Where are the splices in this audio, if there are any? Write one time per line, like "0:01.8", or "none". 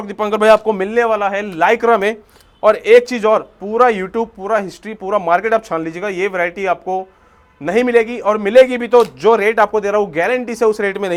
none